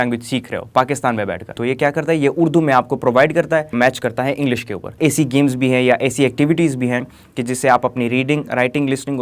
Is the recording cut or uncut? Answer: cut